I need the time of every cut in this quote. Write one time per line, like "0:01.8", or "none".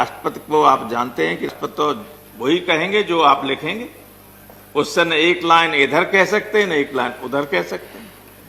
0:01.5